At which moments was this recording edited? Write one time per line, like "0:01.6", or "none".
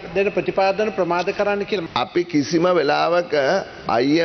0:01.8